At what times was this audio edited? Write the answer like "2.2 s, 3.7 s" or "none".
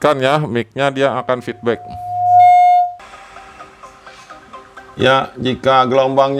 3.1 s

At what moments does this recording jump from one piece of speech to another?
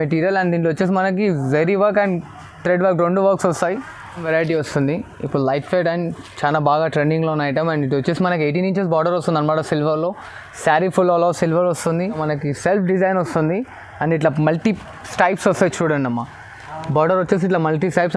4.2 s, 12.2 s

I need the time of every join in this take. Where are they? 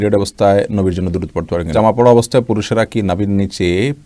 1.7 s

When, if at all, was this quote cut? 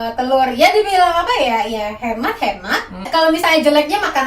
3.1 s

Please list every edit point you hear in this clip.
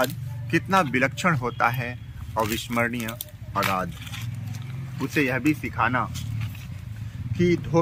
none

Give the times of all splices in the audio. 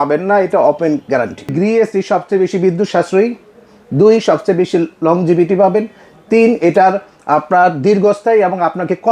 1.5 s

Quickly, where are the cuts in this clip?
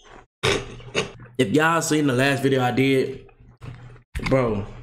1.1 s

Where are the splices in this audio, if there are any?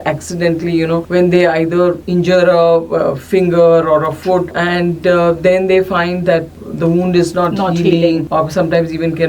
1.0 s, 2.0 s, 4.6 s, 6.5 s, 8.3 s

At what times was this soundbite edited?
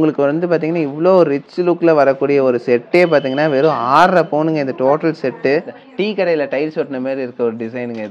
5.8 s

